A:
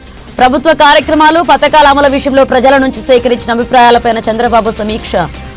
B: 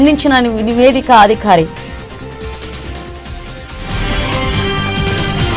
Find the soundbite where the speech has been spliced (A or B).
B